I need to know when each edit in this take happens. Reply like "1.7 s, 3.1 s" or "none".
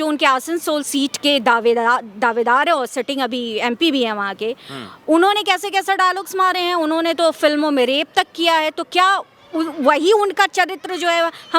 none